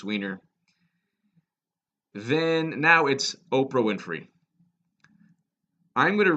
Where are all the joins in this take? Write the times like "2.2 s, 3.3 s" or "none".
3.3 s